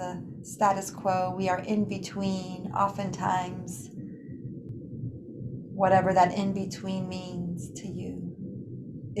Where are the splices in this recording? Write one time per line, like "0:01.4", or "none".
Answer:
0:04.7